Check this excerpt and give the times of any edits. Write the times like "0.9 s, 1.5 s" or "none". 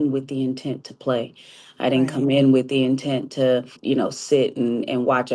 3.8 s